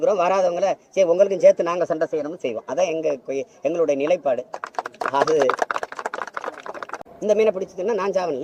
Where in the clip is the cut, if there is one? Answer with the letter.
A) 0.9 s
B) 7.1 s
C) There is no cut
B